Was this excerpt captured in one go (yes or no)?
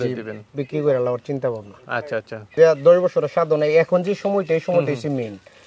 no